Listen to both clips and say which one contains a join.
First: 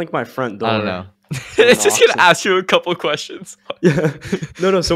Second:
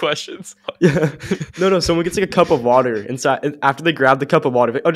first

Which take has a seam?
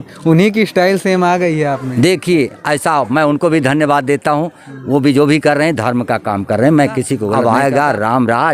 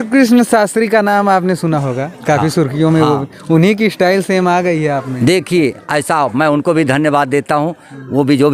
first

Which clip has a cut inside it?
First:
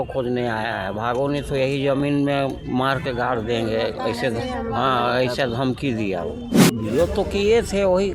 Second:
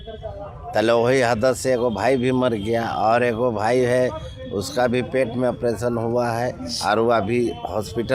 first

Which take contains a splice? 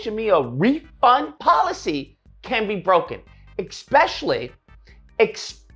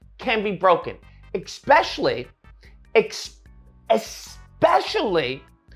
first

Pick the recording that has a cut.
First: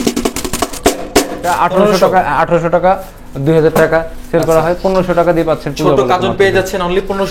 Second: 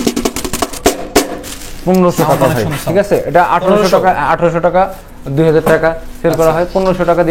first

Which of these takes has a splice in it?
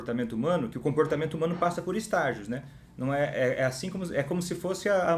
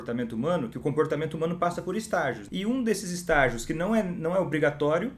second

